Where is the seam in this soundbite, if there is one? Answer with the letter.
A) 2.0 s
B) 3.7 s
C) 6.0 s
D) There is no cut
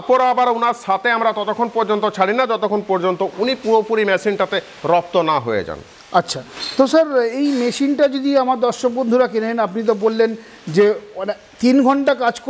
D